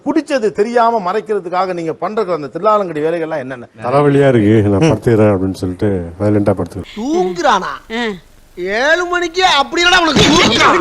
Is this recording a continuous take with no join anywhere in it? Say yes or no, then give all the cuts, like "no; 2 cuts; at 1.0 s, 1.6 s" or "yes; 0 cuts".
no; 2 cuts; at 3.7 s, 6.9 s